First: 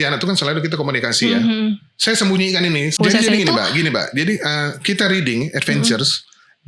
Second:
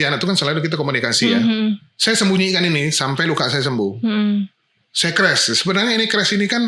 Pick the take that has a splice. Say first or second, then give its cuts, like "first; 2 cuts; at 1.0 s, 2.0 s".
first; 1 cut; at 3.0 s